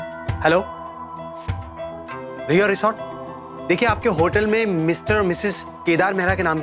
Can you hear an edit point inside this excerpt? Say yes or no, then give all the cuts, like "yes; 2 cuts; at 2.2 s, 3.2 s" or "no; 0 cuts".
no; 0 cuts